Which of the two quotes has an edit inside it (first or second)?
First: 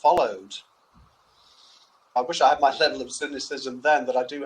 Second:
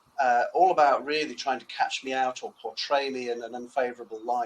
first